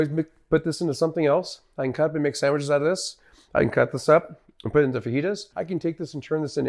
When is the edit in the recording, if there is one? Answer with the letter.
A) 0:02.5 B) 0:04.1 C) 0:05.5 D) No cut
C